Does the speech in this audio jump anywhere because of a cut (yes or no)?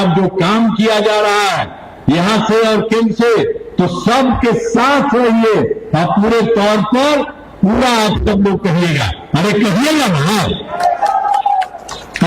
no